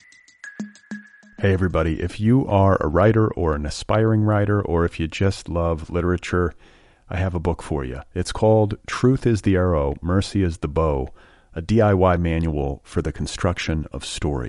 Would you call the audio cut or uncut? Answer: cut